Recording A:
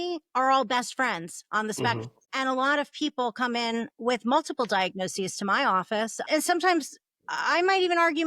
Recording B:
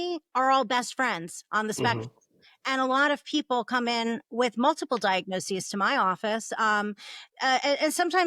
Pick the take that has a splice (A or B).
A